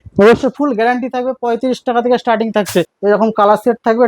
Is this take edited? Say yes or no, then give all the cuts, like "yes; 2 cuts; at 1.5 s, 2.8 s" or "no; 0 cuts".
yes; 1 cut; at 2.9 s